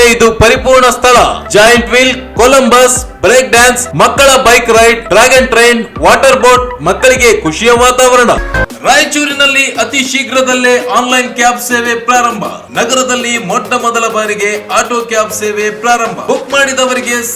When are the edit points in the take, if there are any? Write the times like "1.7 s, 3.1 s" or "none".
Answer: 8.5 s

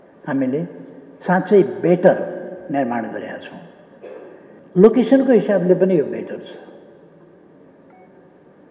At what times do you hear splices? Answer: 4.5 s

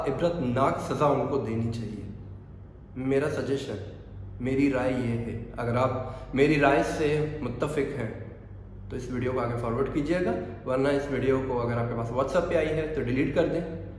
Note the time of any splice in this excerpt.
none

